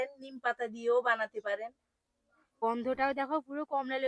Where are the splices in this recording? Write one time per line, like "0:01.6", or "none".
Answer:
0:02.6